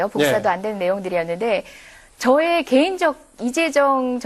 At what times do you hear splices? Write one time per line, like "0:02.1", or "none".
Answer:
0:01.7